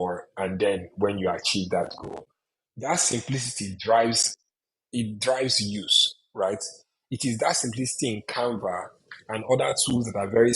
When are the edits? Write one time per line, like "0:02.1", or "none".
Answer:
0:02.7